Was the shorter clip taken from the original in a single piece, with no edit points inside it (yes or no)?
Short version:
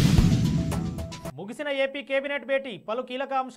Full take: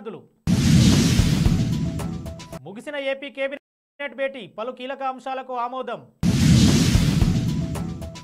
no